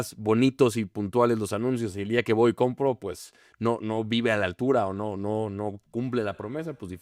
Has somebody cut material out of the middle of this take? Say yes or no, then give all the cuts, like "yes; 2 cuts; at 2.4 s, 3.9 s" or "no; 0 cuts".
no; 0 cuts